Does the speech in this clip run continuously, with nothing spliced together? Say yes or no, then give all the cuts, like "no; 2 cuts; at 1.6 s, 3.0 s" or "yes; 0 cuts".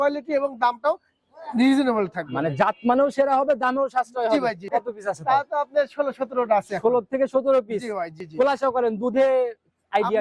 no; 2 cuts; at 4.7 s, 8.2 s